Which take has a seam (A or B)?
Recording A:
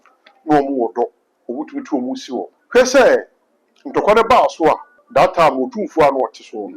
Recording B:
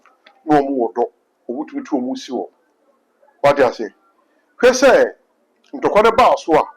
A